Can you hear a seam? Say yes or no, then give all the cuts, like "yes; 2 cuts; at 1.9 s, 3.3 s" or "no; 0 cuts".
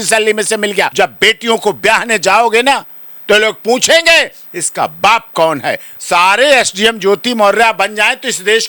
yes; 2 cuts; at 0.9 s, 5.9 s